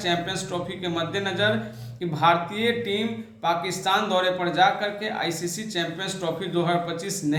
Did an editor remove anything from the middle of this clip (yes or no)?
no